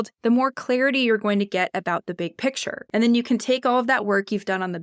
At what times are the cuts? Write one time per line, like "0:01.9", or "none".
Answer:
0:02.8